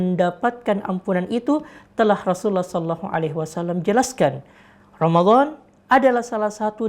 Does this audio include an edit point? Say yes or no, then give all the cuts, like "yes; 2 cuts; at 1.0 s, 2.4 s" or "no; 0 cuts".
yes; 1 cut; at 4.5 s